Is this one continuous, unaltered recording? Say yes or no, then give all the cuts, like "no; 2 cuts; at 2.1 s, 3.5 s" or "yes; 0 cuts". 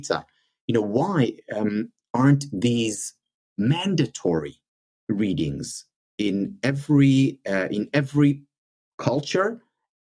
yes; 0 cuts